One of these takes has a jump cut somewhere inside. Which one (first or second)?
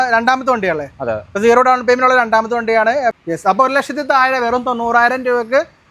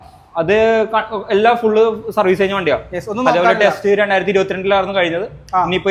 first